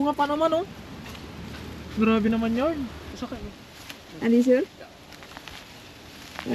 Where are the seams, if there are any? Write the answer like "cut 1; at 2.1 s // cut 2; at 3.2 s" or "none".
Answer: cut 1; at 3.0 s